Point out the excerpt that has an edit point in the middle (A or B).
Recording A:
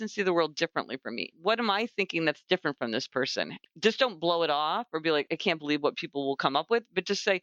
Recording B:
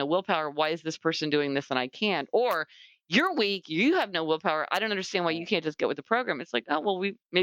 A